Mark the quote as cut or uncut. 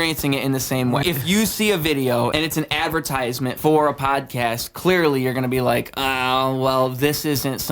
cut